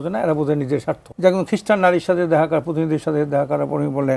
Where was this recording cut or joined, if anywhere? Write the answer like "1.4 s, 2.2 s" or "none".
1.0 s